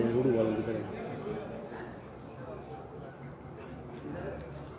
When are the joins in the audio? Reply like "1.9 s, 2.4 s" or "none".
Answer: none